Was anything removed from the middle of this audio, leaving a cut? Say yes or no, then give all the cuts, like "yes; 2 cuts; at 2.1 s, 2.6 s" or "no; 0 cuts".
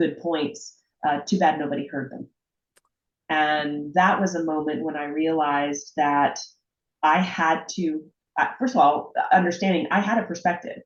no; 0 cuts